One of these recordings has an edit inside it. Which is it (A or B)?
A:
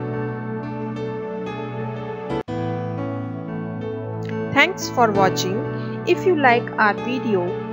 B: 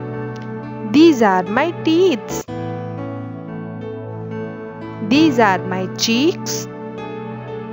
B